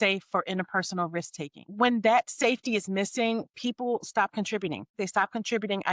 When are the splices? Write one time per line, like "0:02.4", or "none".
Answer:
0:01.7
0:04.9